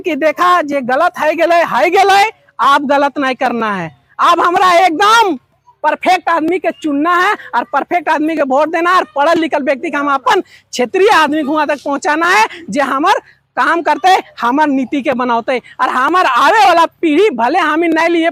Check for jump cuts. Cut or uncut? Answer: uncut